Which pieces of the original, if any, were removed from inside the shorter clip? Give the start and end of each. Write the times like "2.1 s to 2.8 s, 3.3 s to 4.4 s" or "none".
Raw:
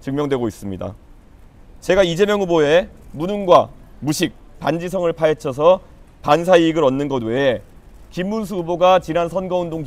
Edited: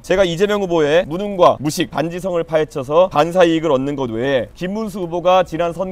2.9 s to 3.2 s, 3.9 s to 4.5 s, 5.8 s to 6.2 s, 7.7 s to 8.1 s